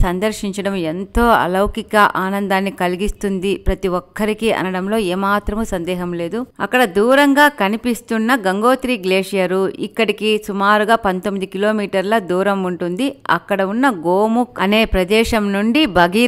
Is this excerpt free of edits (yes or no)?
yes